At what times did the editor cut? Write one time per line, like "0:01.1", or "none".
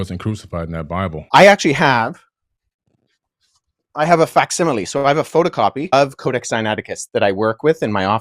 0:01.2